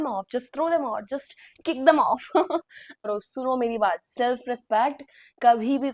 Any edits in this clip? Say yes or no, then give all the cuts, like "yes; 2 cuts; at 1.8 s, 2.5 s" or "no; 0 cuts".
yes; 1 cut; at 3.0 s